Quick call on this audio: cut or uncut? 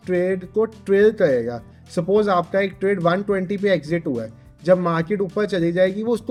uncut